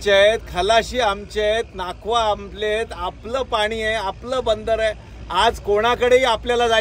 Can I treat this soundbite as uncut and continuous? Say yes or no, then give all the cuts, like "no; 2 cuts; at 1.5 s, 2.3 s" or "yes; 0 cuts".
yes; 0 cuts